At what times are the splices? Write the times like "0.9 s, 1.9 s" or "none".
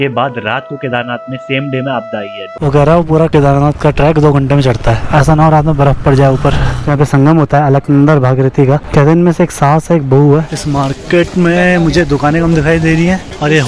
2.5 s, 5.0 s, 6.8 s, 8.8 s, 10.5 s